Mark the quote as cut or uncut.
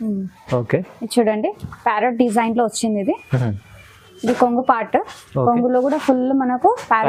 uncut